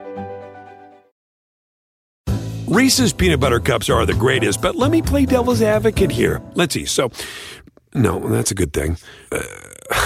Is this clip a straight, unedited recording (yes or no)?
yes